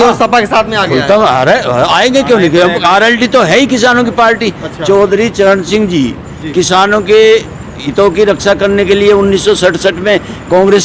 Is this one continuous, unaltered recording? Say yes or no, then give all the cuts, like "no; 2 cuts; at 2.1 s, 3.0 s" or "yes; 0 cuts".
yes; 0 cuts